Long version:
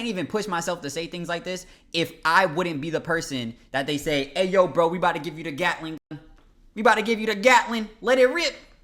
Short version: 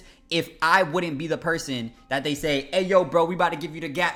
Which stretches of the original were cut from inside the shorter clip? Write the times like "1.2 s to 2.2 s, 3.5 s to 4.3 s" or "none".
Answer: none